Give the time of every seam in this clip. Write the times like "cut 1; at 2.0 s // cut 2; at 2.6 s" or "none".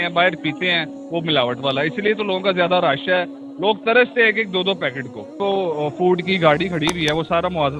cut 1; at 5.4 s